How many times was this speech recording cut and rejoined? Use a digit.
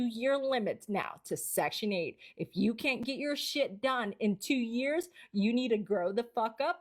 0